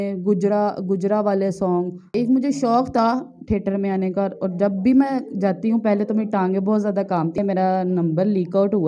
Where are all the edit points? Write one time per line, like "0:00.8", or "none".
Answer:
0:02.0
0:07.4